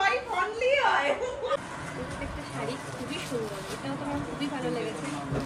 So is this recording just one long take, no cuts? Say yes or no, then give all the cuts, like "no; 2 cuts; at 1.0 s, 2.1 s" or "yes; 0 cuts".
no; 1 cut; at 1.6 s